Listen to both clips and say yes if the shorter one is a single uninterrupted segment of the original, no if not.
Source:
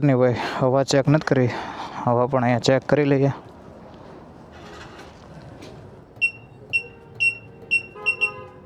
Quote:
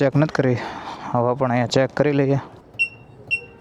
no